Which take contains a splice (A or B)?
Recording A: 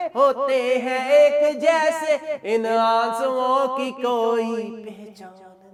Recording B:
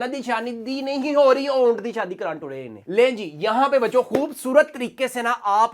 B